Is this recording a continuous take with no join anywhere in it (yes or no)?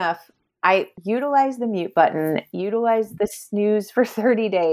no